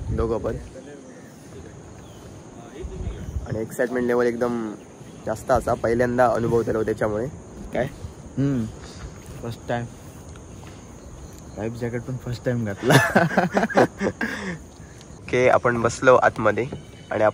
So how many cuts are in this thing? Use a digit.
0